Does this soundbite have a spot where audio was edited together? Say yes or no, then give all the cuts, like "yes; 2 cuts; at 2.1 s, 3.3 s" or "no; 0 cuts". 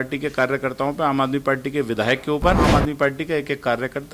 yes; 1 cut; at 2.7 s